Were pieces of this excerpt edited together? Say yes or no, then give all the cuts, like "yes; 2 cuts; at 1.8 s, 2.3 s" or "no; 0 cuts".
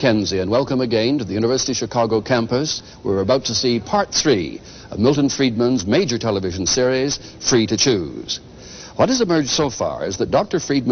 no; 0 cuts